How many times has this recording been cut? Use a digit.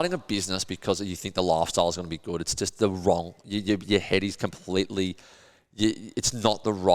0